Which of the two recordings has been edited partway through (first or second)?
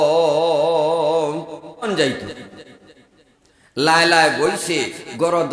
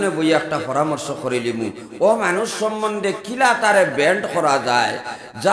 first